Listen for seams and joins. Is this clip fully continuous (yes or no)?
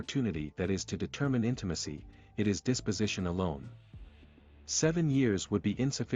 yes